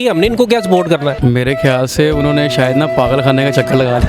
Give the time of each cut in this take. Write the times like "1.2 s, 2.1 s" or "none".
1.2 s